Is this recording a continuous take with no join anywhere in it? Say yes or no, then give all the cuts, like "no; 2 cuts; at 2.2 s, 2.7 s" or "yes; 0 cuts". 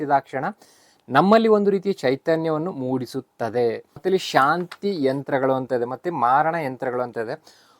no; 1 cut; at 4.0 s